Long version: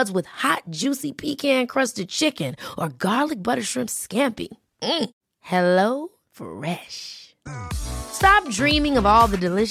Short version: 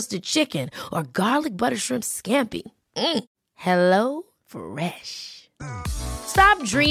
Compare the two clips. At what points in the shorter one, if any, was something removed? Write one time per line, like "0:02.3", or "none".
none